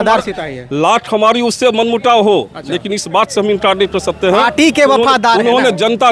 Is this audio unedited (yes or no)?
yes